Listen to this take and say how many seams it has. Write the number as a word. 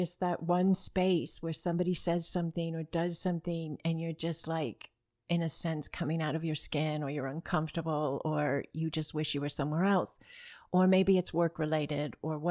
zero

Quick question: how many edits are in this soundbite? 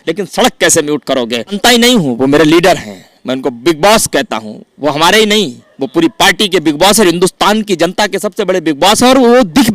one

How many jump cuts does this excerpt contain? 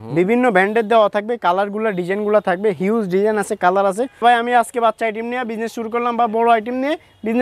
one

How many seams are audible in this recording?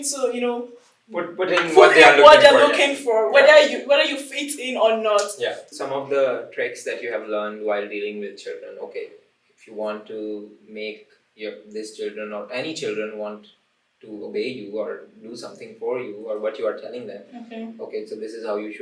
one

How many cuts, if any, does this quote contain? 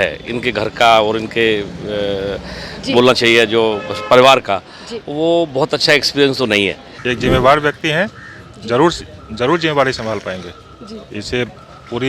one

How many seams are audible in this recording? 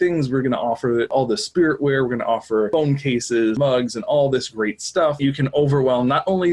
four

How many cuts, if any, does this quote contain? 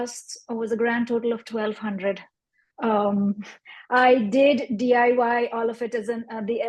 zero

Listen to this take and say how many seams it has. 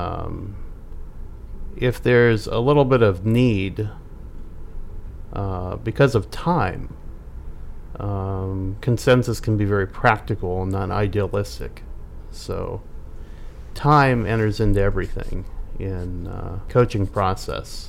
one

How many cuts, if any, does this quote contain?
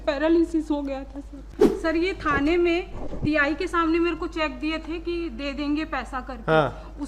one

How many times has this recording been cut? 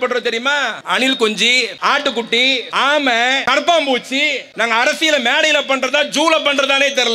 five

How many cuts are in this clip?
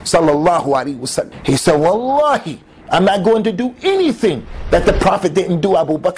one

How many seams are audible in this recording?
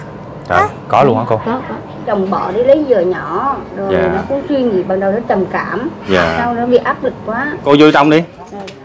two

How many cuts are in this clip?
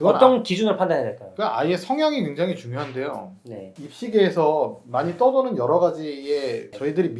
zero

